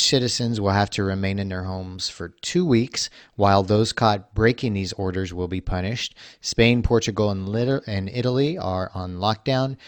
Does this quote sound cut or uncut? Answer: uncut